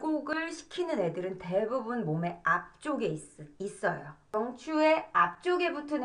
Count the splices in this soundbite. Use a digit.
1